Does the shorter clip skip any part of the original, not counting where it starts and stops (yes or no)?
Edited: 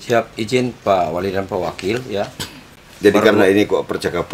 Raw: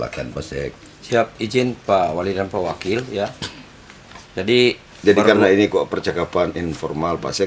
yes